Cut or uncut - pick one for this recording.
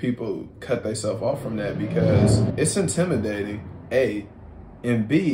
cut